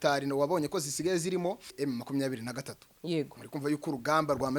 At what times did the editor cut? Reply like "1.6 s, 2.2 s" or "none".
1.7 s